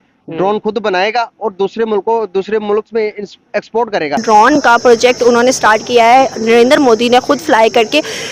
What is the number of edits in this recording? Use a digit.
1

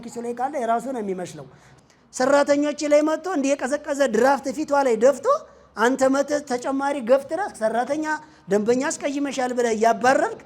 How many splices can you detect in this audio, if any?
1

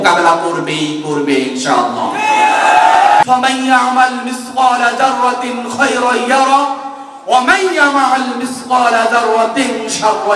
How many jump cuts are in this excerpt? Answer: 1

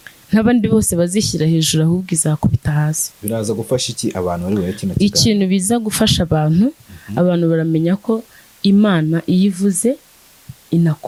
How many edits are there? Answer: 0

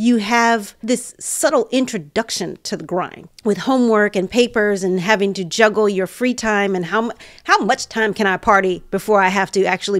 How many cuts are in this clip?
1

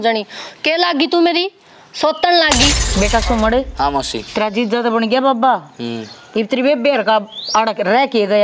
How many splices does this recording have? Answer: 1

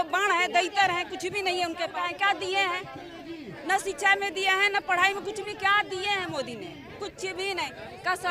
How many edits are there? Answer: 1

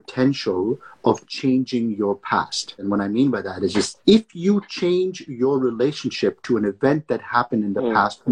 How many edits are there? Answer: 1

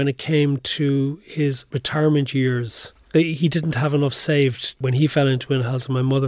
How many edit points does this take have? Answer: 3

